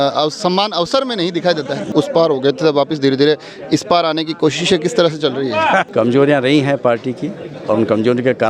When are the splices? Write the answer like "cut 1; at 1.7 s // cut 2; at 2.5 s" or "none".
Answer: cut 1; at 1.9 s // cut 2; at 5.9 s